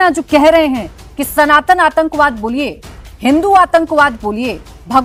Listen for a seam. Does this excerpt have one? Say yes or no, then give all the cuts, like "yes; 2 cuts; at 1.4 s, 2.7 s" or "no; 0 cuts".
no; 0 cuts